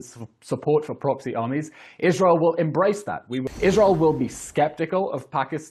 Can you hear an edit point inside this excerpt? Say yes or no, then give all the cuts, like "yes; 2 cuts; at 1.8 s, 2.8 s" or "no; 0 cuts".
yes; 1 cut; at 3.5 s